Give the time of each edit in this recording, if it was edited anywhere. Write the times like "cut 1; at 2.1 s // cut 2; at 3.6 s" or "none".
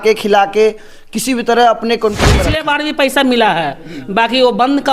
cut 1; at 2.3 s